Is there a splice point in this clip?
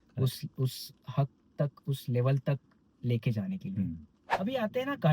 yes; 1 cut; at 4.1 s

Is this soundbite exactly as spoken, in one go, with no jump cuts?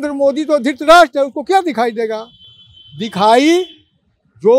yes; 0 cuts

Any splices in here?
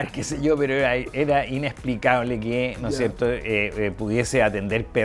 no; 0 cuts

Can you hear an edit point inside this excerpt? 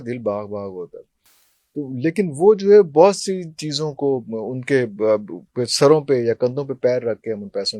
no; 0 cuts

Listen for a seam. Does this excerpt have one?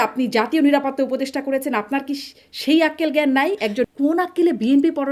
yes; 1 cut; at 3.9 s

